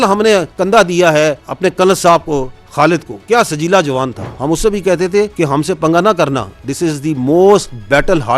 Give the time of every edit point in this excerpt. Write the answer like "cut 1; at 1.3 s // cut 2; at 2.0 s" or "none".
cut 1; at 4.3 s